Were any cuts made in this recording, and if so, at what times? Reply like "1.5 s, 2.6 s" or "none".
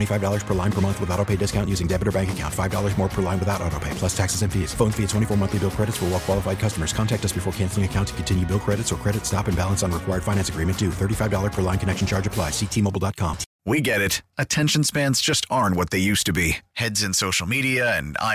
13.5 s